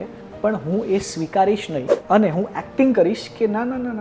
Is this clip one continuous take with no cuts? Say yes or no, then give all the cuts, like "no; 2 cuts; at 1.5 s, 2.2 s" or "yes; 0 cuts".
no; 1 cut; at 1.9 s